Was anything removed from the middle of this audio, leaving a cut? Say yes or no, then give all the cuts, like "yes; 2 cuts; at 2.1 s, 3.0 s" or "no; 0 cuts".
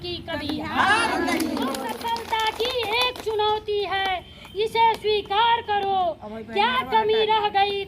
yes; 1 cut; at 1.9 s